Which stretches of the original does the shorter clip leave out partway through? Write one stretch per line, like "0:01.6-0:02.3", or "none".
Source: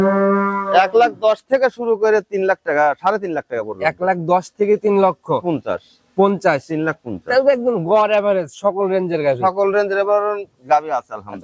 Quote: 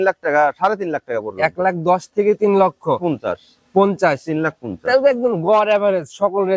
none